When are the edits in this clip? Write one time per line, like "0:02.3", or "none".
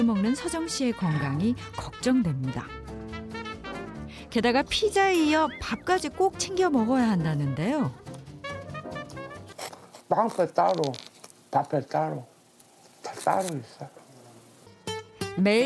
0:09.5
0:14.7